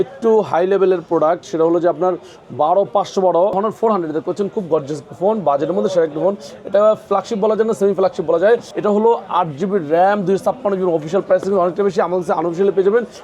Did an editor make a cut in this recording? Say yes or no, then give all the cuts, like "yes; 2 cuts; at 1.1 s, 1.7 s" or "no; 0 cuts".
yes; 2 cuts; at 3.5 s, 8.7 s